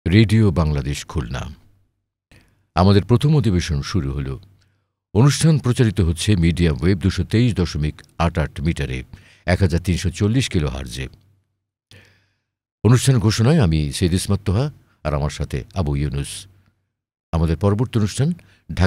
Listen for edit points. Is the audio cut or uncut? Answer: uncut